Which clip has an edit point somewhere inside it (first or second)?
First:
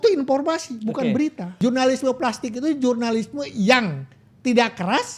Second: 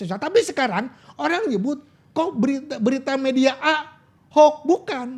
first